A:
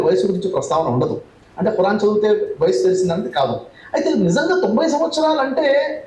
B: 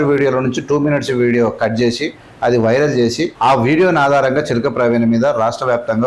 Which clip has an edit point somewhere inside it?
B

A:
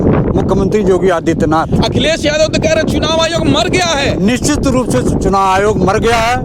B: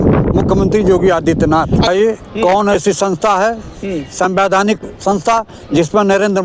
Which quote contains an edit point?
B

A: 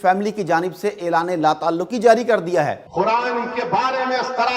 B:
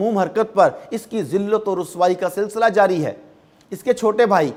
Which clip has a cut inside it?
A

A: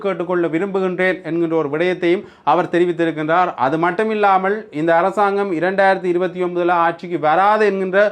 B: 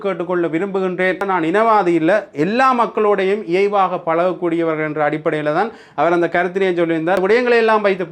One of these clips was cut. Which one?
B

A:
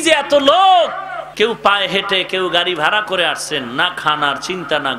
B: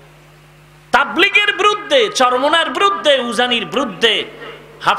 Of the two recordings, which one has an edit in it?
A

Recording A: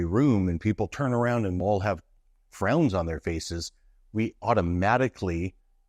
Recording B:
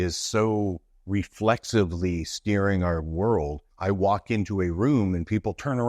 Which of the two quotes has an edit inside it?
B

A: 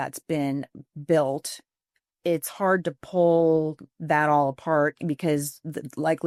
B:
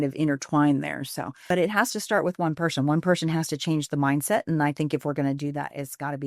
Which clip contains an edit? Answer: B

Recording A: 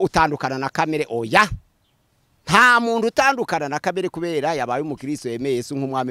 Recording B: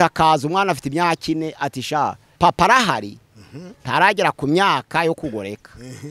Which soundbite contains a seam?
B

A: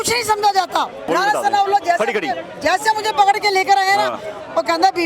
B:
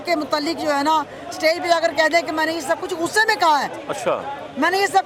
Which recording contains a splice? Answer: A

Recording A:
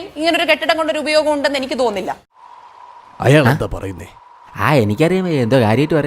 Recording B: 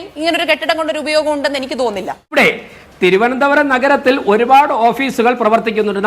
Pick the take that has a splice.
B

